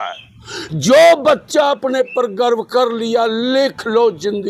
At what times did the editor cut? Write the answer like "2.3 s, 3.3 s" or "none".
none